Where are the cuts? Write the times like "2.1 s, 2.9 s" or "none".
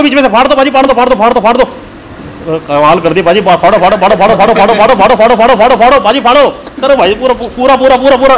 6.7 s